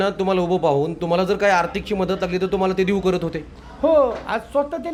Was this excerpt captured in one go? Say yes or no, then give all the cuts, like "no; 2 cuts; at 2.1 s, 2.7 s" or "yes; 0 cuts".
yes; 0 cuts